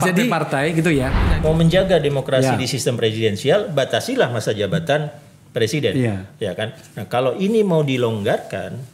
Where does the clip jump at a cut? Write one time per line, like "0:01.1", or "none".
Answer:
0:01.2